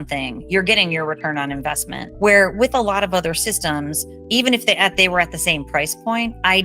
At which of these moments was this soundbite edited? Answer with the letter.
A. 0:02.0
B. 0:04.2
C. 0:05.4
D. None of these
A